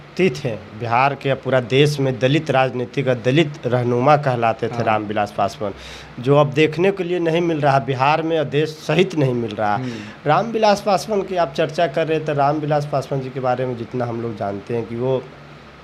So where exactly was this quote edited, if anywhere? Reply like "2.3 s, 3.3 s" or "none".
none